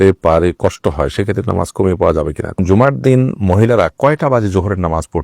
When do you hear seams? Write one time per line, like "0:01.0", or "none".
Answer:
0:02.6